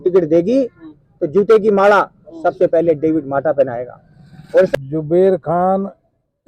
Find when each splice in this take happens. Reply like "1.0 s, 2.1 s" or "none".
4.8 s